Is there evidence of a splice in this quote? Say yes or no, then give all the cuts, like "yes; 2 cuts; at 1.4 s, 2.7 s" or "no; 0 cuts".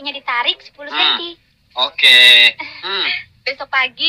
yes; 2 cuts; at 1.6 s, 2.9 s